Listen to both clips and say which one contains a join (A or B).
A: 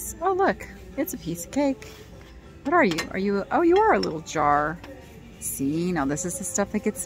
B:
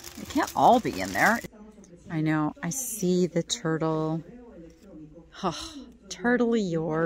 B